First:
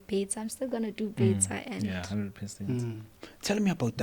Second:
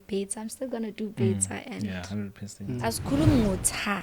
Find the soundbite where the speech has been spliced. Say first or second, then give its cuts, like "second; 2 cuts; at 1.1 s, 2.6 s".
second; 1 cut; at 2.8 s